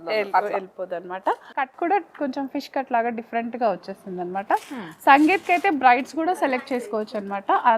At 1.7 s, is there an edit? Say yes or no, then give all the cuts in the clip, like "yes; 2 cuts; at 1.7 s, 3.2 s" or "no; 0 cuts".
yes; 1 cut; at 1.7 s